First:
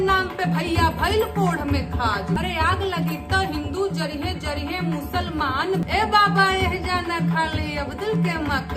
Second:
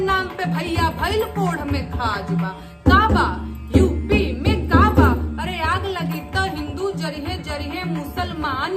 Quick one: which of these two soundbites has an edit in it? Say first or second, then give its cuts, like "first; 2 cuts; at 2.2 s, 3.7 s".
first; 2 cuts; at 2.4 s, 5.8 s